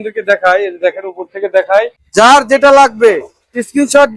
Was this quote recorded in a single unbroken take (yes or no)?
no